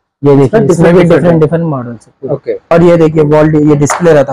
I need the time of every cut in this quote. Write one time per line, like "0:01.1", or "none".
0:02.6